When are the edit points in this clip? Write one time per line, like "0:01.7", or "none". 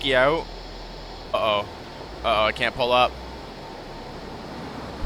0:01.3